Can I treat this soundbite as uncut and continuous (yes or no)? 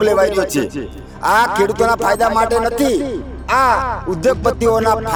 yes